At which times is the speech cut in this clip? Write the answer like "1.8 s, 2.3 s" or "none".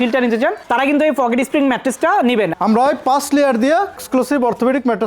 2.5 s